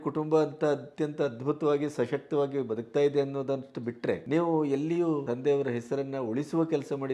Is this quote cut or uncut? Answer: cut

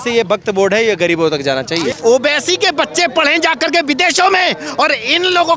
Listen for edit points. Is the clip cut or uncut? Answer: cut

